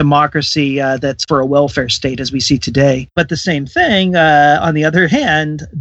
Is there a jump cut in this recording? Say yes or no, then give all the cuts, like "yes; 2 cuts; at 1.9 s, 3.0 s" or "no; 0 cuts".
yes; 2 cuts; at 1.2 s, 3.1 s